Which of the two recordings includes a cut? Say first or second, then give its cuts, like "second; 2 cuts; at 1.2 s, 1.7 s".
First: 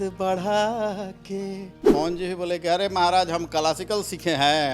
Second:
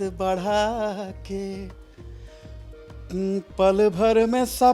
first; 1 cut; at 1.8 s